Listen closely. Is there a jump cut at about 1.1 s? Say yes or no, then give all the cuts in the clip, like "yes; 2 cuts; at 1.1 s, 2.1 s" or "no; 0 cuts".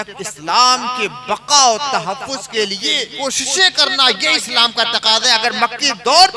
no; 1 cut; at 3.1 s